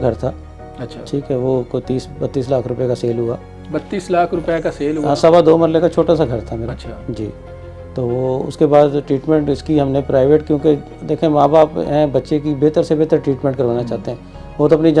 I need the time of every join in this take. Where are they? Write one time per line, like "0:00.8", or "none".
none